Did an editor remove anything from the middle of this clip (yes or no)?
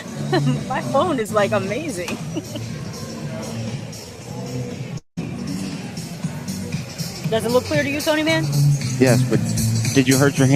no